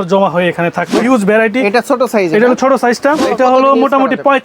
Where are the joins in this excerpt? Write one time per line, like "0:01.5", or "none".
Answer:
0:00.9
0:03.3

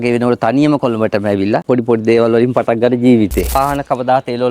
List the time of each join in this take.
0:03.6

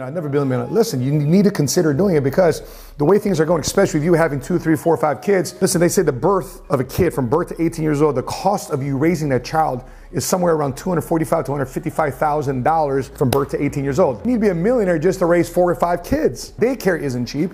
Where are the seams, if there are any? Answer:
0:14.2
0:16.5

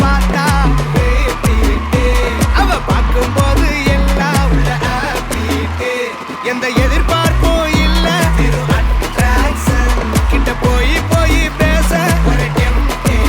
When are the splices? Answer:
none

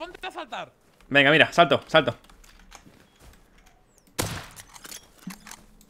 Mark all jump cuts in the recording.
none

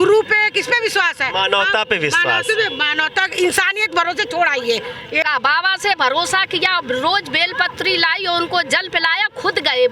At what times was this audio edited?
0:05.2

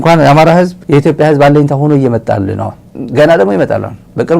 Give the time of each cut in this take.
0:02.8

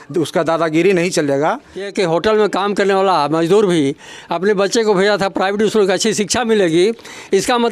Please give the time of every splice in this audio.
0:01.9

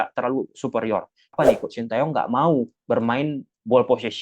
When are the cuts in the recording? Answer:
0:01.3

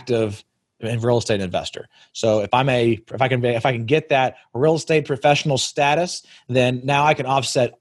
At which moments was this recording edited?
none

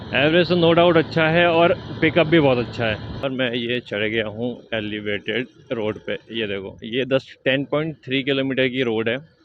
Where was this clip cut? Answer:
0:03.2

